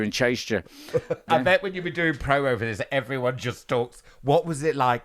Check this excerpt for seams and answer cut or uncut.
cut